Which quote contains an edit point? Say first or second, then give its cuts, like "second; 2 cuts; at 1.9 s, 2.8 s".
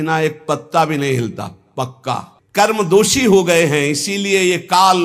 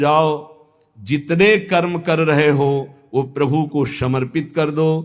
first; 1 cut; at 2.3 s